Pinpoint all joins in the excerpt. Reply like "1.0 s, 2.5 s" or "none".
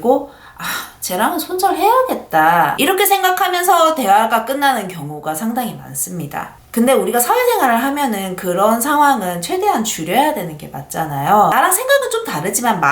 11.5 s